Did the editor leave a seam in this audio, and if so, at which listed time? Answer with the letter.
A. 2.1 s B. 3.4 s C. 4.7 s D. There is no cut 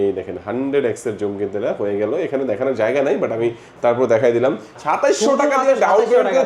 C